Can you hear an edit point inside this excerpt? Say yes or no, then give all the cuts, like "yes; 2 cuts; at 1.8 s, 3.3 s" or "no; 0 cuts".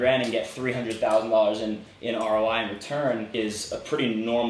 yes; 1 cut; at 3.3 s